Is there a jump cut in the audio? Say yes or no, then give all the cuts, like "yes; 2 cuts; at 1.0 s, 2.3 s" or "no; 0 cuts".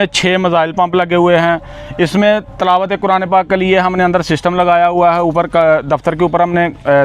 no; 0 cuts